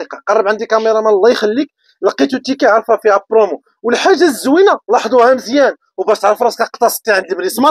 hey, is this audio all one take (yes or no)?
yes